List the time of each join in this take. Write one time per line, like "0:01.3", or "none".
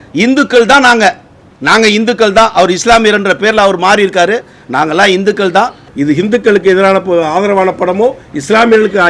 0:05.8